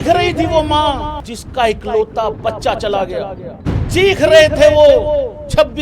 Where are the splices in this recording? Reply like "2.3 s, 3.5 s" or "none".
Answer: 1.2 s, 3.4 s